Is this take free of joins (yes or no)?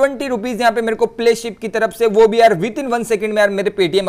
yes